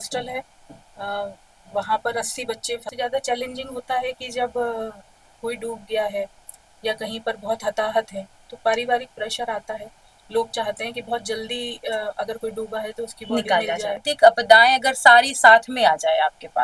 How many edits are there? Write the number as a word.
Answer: two